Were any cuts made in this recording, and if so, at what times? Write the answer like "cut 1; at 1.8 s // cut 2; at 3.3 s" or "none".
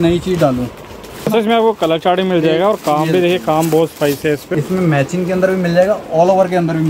cut 1; at 1.3 s // cut 2; at 4.5 s